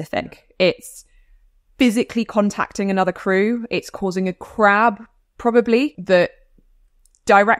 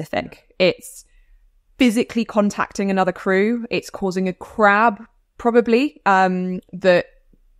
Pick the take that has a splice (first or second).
first